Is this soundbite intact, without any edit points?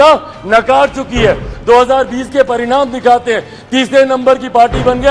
yes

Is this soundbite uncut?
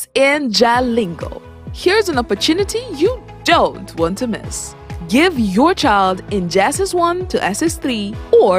yes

